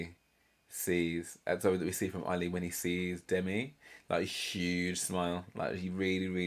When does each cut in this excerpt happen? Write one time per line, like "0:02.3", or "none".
none